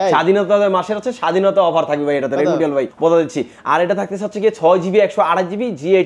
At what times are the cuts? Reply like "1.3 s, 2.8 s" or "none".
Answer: none